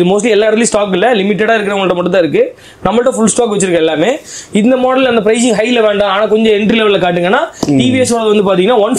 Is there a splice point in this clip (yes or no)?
no